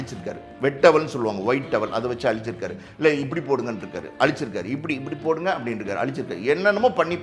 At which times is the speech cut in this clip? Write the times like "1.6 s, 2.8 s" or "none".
none